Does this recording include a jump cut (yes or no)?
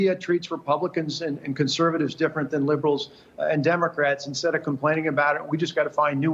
no